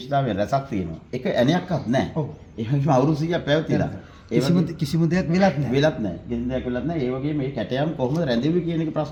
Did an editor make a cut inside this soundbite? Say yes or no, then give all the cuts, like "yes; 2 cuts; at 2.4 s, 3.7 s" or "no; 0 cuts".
no; 0 cuts